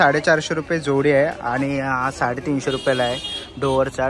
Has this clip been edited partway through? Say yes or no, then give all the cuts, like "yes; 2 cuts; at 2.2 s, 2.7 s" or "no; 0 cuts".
no; 0 cuts